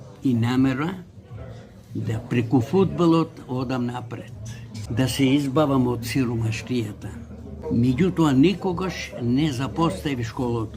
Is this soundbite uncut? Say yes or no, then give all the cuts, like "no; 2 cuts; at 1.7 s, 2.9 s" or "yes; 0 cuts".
no; 2 cuts; at 4.7 s, 7.4 s